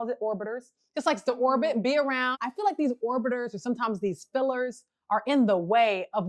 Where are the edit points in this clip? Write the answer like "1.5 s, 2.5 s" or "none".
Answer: 2.4 s